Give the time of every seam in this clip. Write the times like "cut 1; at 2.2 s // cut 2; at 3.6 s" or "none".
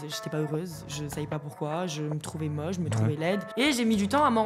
cut 1; at 3.5 s